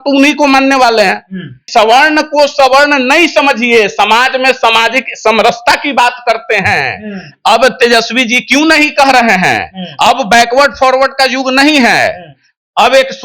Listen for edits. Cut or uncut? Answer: cut